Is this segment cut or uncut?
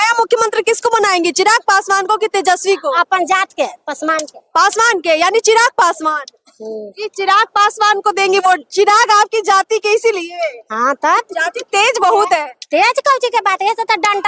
uncut